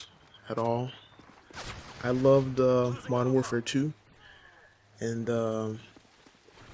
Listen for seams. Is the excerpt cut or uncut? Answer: uncut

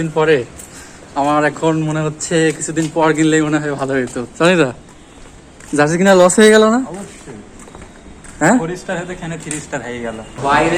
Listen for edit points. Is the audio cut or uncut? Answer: uncut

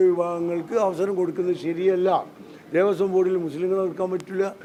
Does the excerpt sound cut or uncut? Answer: uncut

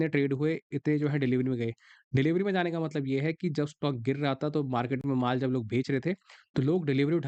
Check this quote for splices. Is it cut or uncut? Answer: uncut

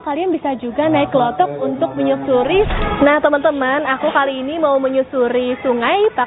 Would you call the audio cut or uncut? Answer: cut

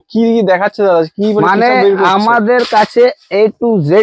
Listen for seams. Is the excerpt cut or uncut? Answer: uncut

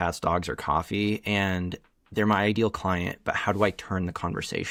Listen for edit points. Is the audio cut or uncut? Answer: uncut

